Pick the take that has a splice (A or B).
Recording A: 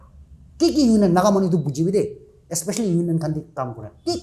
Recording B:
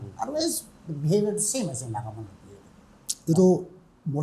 B